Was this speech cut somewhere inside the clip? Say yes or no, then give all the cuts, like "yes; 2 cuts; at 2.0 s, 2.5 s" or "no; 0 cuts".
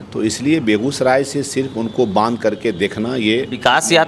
no; 0 cuts